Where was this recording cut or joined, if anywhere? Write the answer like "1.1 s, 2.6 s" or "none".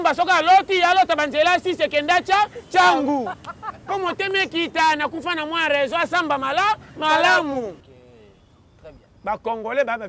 7.9 s